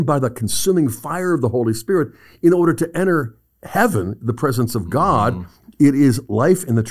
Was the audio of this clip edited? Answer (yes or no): yes